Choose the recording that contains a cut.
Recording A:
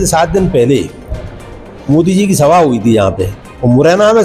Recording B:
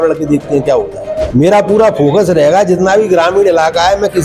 B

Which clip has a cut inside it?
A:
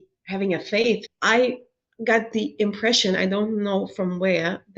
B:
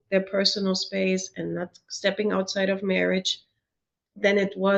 A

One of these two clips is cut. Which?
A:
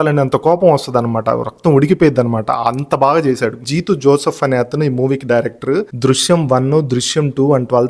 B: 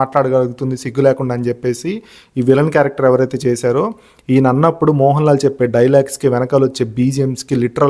A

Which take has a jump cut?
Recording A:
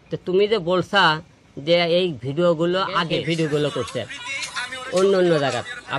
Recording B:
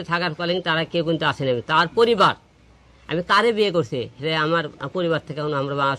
A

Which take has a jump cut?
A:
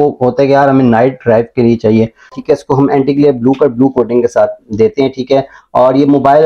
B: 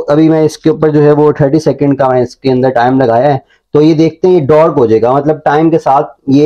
A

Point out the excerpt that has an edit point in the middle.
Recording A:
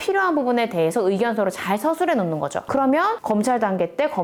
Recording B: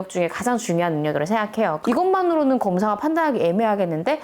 B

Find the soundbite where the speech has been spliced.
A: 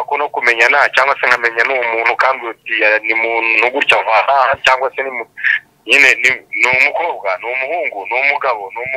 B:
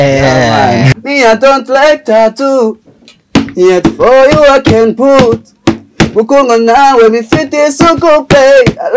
B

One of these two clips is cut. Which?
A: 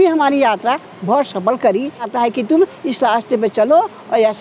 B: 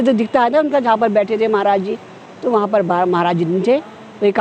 A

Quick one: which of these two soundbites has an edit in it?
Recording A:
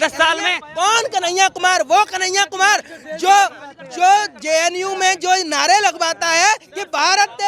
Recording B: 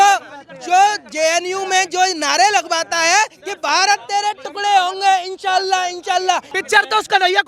B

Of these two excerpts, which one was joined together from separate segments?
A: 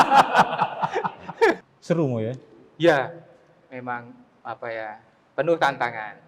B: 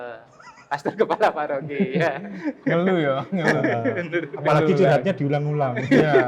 A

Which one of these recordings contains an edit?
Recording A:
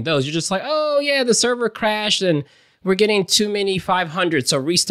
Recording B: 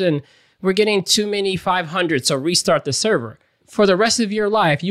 B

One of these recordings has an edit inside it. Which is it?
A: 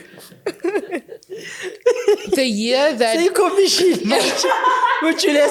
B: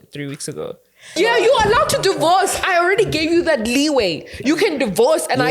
B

